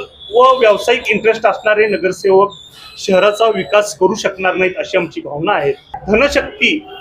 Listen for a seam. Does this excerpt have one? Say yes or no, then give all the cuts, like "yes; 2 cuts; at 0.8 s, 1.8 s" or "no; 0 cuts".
yes; 1 cut; at 6.0 s